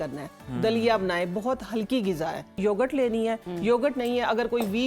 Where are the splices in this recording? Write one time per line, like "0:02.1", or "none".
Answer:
0:02.6